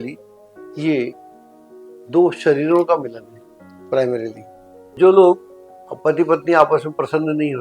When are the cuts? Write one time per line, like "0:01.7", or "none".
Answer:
0:04.9